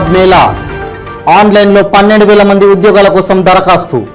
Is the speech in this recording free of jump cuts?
yes; 0 cuts

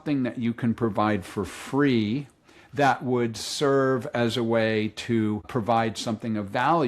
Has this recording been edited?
yes; 1 cut; at 5.5 s

